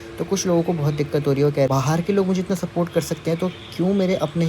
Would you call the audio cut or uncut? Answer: cut